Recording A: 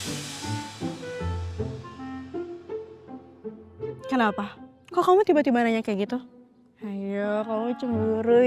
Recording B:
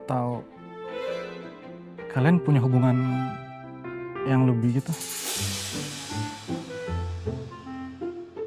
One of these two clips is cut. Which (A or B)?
A